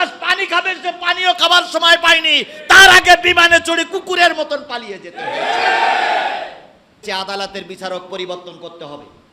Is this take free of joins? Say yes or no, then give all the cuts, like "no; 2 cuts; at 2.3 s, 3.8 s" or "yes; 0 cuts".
no; 1 cut; at 7.0 s